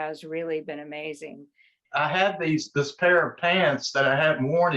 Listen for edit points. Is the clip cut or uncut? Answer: cut